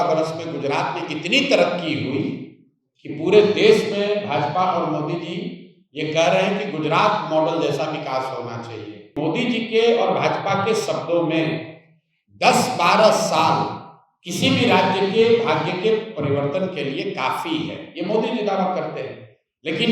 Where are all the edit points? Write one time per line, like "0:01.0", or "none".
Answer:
0:09.1